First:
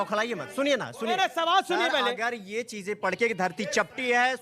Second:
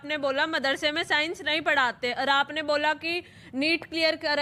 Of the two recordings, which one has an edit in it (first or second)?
first